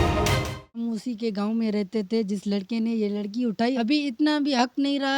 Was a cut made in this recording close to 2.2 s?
no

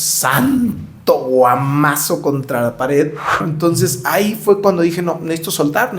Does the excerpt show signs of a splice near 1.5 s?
no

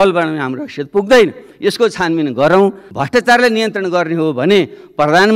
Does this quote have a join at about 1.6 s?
no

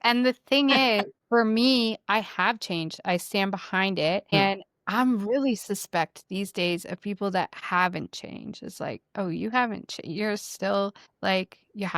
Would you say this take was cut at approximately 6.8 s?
no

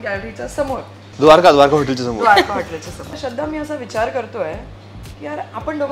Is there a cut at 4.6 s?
no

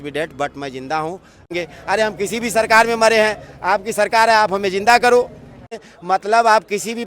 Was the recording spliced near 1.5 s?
yes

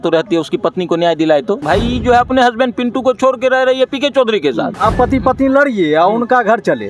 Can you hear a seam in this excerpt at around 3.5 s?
no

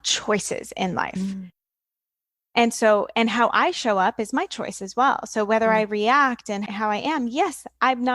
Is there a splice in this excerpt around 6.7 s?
yes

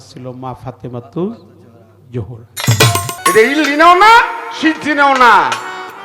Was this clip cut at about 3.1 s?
yes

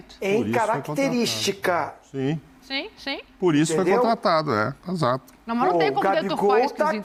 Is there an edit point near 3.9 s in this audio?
no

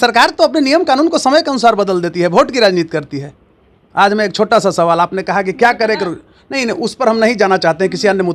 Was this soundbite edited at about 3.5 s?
no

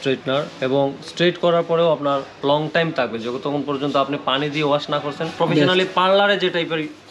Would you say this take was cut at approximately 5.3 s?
yes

